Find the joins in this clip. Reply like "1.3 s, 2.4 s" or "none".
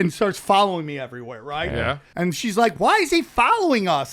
2.0 s